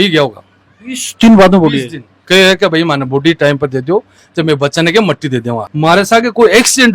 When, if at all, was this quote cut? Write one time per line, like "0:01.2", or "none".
0:02.2
0:05.7